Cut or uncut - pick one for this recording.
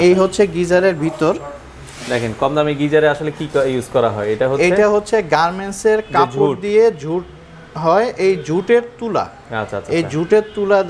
uncut